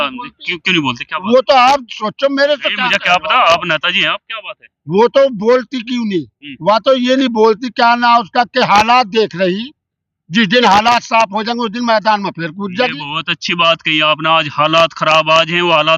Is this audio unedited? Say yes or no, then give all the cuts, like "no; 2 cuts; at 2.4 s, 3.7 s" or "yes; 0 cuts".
yes; 0 cuts